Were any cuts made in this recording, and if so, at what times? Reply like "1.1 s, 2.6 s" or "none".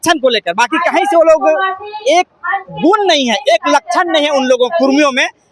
none

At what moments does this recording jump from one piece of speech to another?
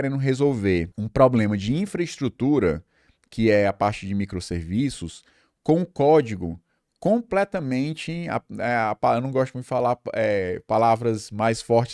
1.0 s

